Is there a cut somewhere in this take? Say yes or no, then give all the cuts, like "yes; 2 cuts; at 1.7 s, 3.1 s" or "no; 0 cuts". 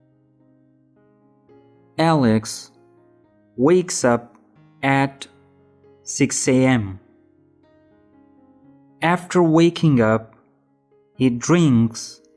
yes; 1 cut; at 1.9 s